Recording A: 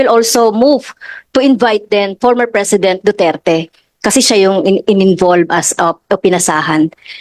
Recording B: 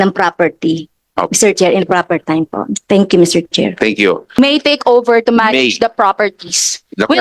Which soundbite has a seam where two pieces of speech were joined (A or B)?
B